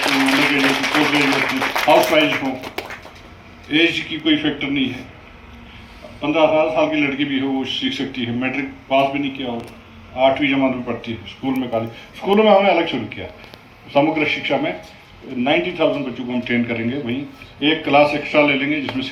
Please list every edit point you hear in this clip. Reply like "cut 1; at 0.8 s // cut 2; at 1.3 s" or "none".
none